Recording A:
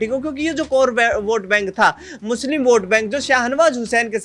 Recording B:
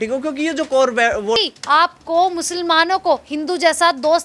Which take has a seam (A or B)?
B